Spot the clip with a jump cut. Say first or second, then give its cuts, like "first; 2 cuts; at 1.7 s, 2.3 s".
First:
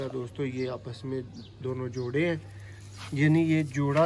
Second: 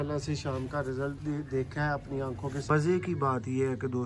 second; 1 cut; at 2.7 s